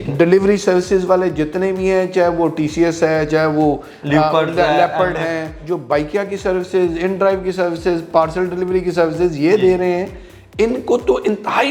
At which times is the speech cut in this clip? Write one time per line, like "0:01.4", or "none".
0:05.6